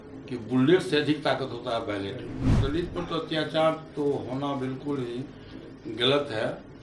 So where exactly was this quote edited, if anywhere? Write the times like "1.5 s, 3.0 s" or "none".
2.6 s